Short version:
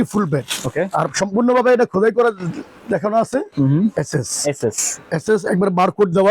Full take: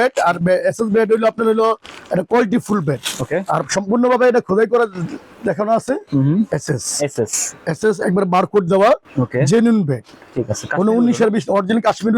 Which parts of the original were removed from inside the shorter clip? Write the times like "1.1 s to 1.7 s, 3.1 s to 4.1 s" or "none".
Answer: none